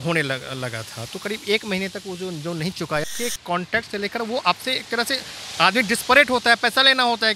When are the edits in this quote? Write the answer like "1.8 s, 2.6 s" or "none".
3.0 s